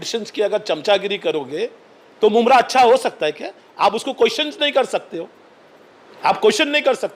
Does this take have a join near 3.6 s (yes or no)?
no